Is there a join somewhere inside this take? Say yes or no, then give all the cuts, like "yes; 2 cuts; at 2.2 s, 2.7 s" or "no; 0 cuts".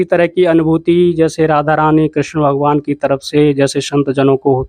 no; 0 cuts